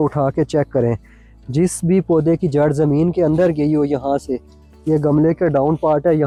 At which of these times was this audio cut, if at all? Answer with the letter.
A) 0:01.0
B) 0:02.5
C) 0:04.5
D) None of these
D